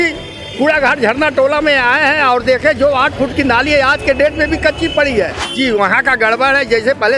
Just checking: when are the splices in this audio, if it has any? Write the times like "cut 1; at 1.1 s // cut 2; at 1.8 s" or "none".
cut 1; at 5.4 s